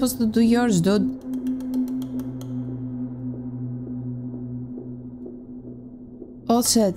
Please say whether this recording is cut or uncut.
uncut